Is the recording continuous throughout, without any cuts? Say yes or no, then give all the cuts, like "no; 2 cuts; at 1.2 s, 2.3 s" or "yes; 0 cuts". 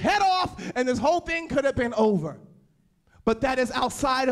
yes; 0 cuts